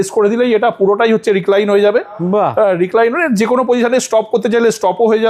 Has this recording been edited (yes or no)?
no